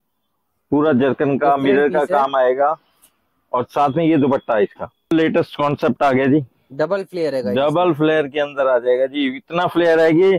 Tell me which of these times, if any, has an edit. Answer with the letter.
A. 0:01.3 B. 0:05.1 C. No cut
B